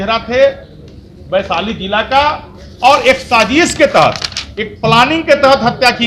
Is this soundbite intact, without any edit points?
yes; 0 cuts

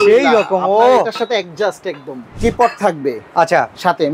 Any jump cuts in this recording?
yes; 1 cut; at 2.3 s

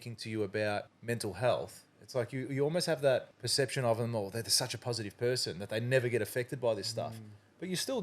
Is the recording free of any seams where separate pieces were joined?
no; 2 cuts; at 0.9 s, 3.4 s

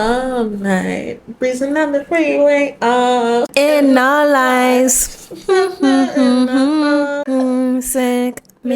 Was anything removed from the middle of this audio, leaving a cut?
yes; 2 cuts; at 3.5 s, 7.2 s

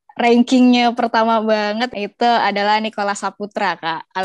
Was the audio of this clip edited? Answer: yes; 1 cut; at 1.9 s

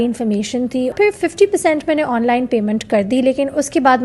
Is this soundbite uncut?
no; 1 cut; at 0.9 s

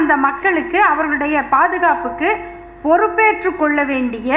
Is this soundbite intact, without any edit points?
yes; 0 cuts

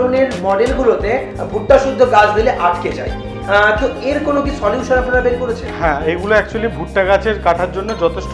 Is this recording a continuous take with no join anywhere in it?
yes; 0 cuts

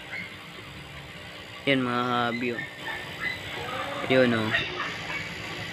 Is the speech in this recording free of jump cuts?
yes; 0 cuts

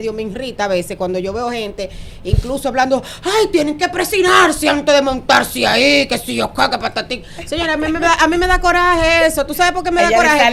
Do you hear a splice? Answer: no; 0 cuts

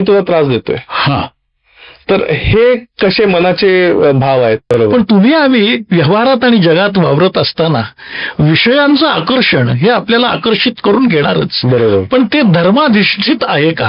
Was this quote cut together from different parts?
yes; 1 cut; at 4.8 s

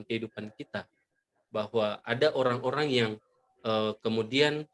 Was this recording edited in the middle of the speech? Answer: no; 0 cuts

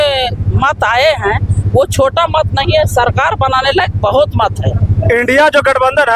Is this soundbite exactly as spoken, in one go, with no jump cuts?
yes; 0 cuts

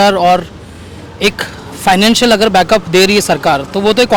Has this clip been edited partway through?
no; 0 cuts

